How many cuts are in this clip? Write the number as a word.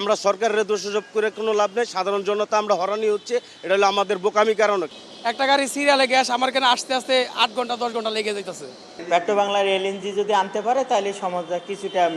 two